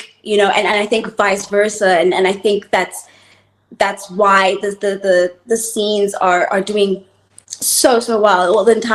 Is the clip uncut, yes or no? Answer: yes